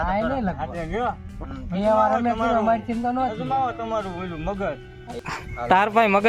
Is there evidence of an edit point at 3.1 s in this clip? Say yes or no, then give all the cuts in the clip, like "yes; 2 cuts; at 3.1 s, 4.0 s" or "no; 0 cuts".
no; 1 cut; at 5.2 s